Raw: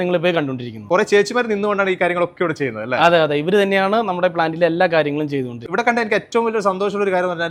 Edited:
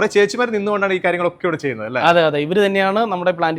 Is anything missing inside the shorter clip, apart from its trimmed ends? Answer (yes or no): no